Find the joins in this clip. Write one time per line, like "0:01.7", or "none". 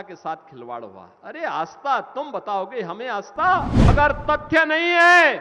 0:03.8